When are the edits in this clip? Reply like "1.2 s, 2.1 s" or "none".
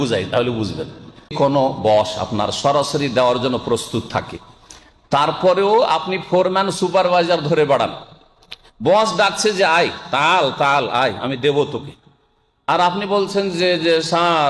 1.3 s